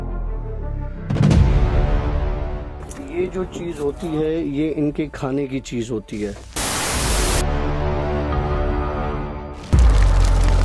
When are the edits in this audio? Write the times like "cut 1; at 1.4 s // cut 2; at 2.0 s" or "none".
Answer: none